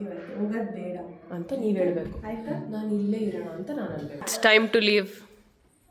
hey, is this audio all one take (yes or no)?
no